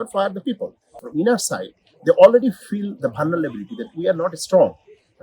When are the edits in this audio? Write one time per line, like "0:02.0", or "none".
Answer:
0:01.0